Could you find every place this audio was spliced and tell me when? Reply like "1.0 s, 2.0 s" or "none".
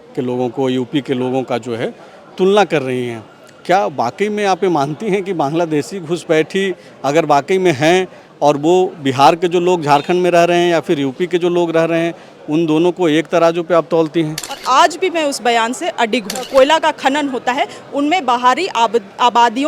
14.5 s, 16.4 s